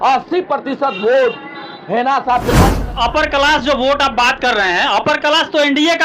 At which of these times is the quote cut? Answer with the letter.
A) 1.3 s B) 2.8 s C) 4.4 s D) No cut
B